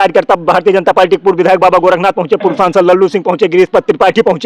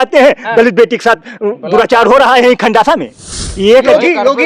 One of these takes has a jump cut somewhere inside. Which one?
second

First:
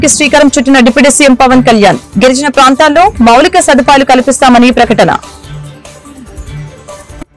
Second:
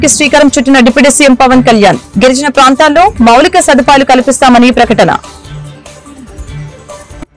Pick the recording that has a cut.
first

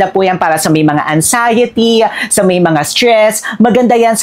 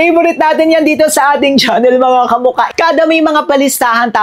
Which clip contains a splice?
second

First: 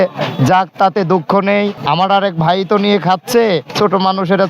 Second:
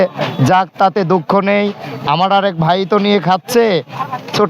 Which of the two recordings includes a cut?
first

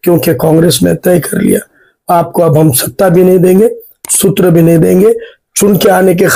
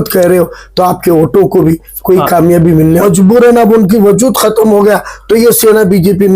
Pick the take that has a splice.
second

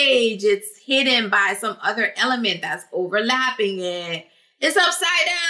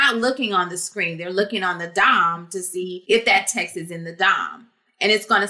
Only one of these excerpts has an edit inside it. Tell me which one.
second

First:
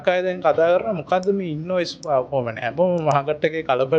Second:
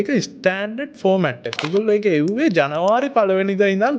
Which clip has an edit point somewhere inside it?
second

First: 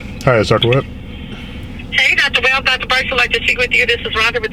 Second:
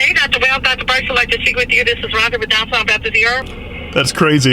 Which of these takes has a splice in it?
second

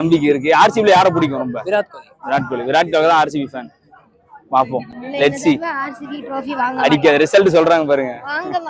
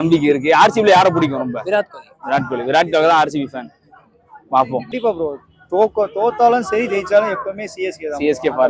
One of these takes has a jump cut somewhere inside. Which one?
second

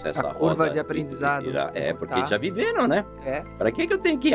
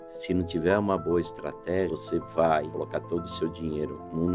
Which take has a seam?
second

